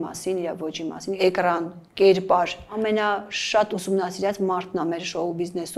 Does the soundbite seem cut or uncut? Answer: cut